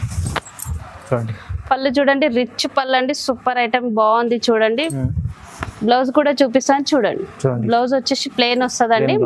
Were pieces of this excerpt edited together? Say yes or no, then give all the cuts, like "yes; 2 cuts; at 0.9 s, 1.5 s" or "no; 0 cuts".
no; 0 cuts